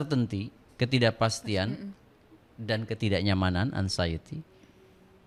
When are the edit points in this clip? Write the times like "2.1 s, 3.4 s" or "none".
none